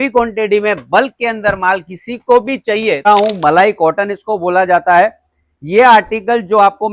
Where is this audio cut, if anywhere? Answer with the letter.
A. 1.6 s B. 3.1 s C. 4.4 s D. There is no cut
B